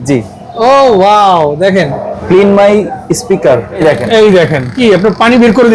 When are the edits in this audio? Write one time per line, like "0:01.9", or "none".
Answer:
0:02.1
0:03.8
0:04.7